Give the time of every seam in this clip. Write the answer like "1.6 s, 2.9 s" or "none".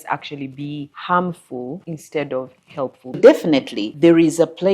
0.9 s, 1.9 s, 3.2 s, 3.8 s